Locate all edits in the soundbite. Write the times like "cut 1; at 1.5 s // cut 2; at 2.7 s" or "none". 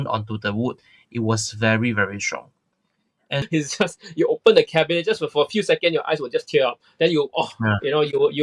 cut 1; at 3.4 s

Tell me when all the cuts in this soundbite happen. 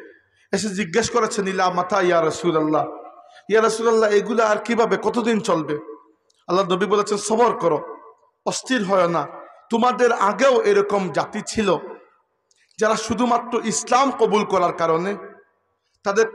none

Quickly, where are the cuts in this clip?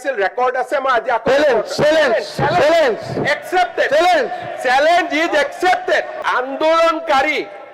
cut 1; at 6.1 s

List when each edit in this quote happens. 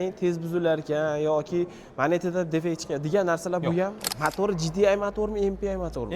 cut 1; at 4.1 s

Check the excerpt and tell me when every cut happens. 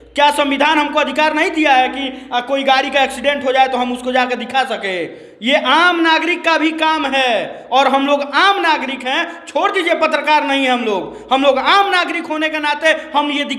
none

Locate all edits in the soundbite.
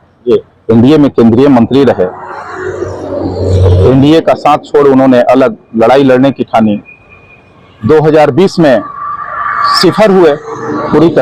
none

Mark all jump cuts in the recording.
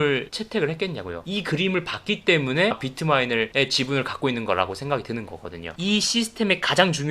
cut 1; at 5.8 s

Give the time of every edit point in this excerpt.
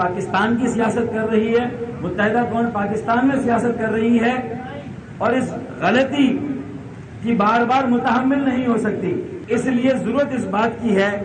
none

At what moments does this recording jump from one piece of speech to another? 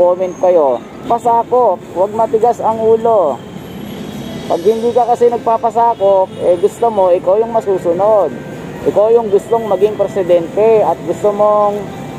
cut 1; at 1.0 s

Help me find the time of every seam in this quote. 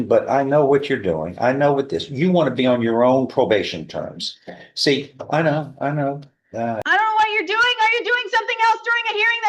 cut 1; at 6.8 s

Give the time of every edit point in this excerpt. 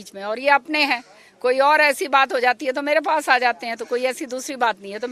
none

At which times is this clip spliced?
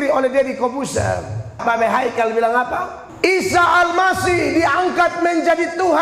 cut 1; at 1.6 s // cut 2; at 3.0 s

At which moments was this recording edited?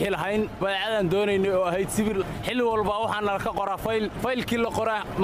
cut 1; at 2.3 s // cut 2; at 4.1 s

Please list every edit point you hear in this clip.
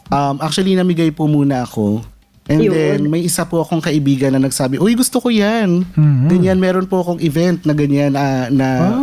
none

